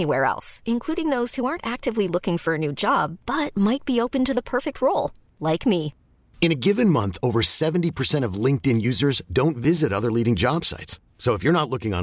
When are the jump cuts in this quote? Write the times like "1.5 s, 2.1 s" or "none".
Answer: none